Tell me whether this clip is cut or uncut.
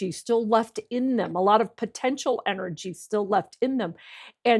uncut